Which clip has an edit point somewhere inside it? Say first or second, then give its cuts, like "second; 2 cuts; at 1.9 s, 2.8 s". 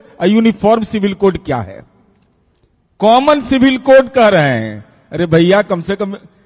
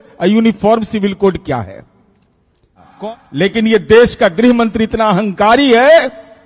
second; 1 cut; at 2.9 s